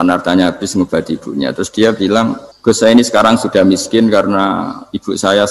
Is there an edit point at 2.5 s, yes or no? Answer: yes